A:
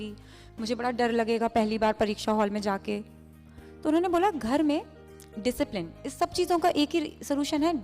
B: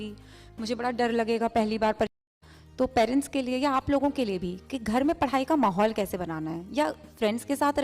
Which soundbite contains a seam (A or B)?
B